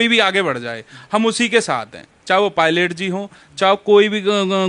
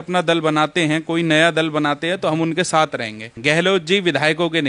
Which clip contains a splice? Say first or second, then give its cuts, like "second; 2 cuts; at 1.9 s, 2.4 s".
second; 1 cut; at 3.3 s